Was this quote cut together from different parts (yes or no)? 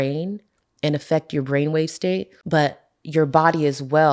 yes